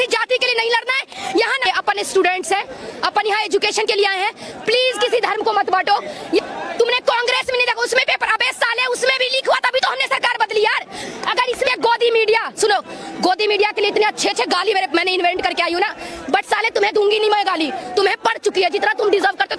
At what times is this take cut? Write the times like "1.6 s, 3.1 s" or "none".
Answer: 1.7 s, 6.4 s, 11.7 s